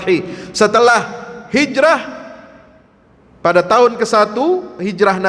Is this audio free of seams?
yes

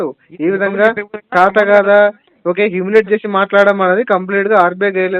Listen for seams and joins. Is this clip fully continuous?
yes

